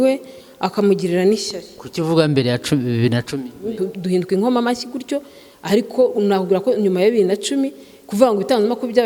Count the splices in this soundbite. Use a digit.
1